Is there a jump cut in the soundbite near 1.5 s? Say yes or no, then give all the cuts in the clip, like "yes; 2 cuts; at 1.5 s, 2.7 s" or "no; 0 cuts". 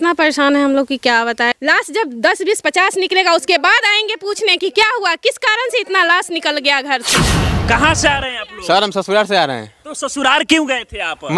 yes; 2 cuts; at 1.5 s, 7.5 s